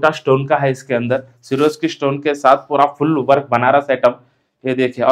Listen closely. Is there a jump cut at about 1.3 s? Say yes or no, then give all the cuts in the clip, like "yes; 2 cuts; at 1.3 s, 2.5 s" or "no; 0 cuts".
no; 0 cuts